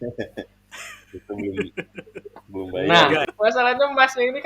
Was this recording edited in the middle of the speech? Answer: yes; 1 cut; at 3.2 s

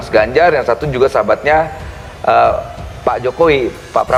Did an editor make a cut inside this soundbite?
no; 0 cuts

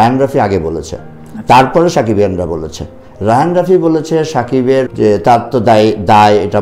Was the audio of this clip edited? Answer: yes; 1 cut; at 4.9 s

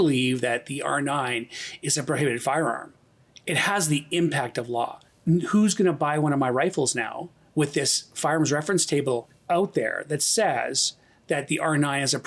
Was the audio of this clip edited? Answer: yes; 2 cuts; at 5.1 s, 9.3 s

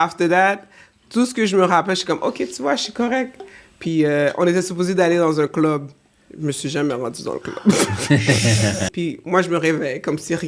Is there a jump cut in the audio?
yes; 1 cut; at 8.9 s

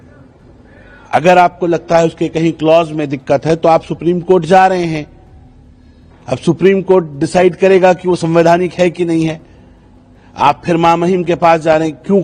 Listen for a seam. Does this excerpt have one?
no; 0 cuts

